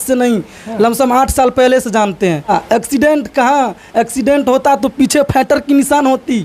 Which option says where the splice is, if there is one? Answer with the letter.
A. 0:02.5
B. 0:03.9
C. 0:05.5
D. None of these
A